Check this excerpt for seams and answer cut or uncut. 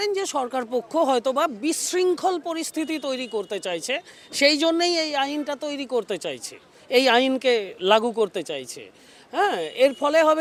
uncut